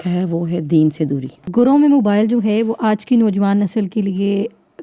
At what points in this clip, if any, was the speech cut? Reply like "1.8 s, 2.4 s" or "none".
1.4 s